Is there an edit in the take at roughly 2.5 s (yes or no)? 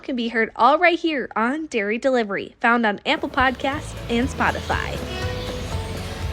no